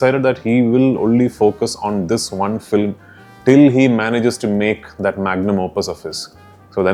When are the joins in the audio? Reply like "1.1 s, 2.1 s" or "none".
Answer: none